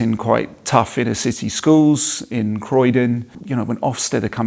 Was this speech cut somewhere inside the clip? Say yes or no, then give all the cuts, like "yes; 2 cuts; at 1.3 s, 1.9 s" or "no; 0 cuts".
yes; 1 cut; at 3.4 s